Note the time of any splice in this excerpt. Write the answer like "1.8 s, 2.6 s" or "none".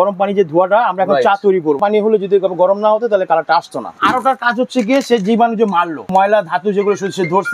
1.8 s, 4.0 s, 6.0 s